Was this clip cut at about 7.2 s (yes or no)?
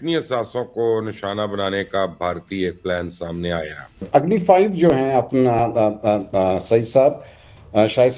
no